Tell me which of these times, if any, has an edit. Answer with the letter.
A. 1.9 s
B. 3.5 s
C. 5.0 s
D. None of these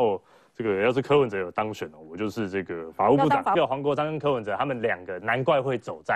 B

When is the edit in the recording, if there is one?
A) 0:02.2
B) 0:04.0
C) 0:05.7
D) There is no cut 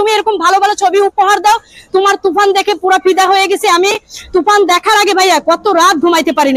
D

